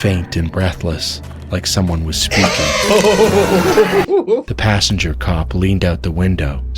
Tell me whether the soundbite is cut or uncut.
cut